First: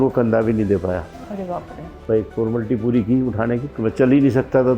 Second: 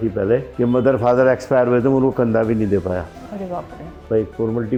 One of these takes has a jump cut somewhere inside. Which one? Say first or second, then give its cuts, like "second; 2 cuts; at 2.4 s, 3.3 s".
first; 1 cut; at 3.7 s